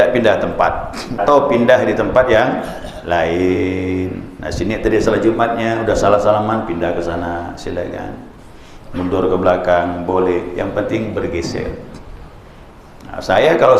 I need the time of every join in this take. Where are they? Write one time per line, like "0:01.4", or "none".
0:01.2